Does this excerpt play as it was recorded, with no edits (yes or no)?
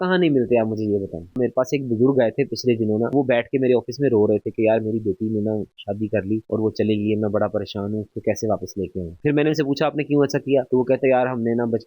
no